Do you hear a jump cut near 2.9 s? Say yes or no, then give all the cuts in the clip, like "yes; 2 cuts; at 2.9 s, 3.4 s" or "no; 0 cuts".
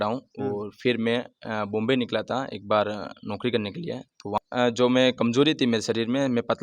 no; 1 cut; at 4.3 s